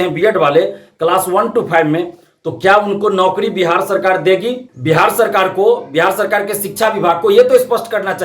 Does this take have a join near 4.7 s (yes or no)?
yes